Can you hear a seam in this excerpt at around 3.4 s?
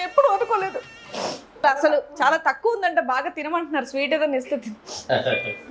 no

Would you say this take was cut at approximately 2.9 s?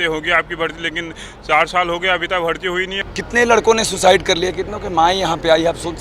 yes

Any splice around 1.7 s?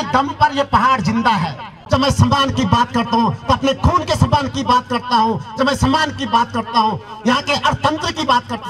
yes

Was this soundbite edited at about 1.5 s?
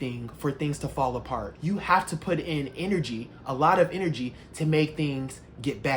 yes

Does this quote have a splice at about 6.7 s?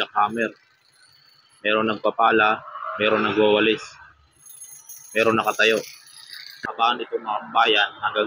yes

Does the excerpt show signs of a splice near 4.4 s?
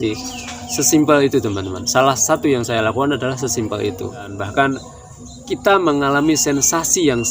yes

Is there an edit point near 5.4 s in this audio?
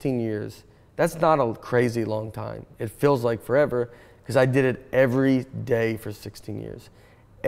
no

